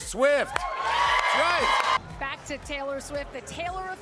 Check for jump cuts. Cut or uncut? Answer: cut